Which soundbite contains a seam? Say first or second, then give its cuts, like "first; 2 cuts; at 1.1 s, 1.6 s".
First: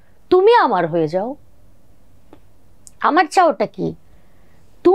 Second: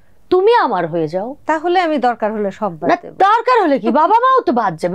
second; 1 cut; at 1.4 s